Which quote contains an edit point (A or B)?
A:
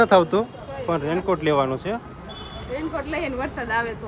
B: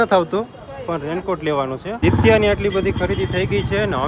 B